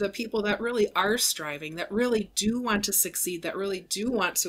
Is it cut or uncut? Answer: uncut